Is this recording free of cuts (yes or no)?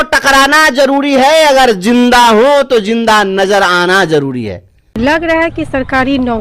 no